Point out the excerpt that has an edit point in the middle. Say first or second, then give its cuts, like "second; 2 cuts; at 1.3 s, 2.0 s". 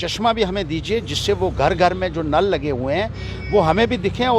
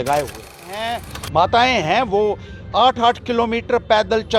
second; 1 cut; at 1.0 s